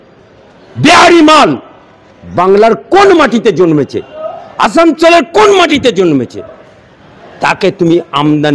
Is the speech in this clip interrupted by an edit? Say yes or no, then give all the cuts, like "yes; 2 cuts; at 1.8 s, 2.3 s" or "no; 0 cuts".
no; 0 cuts